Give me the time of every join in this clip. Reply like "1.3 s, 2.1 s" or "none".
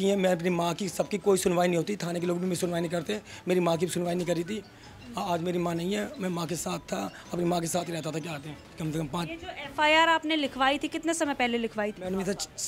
none

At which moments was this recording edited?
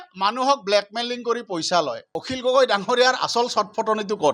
2.0 s

